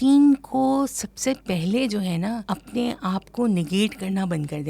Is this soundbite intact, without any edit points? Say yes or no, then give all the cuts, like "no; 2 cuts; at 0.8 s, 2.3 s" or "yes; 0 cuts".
no; 1 cut; at 2.4 s